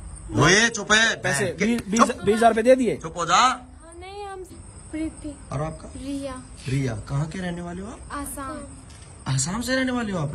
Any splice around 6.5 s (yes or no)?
no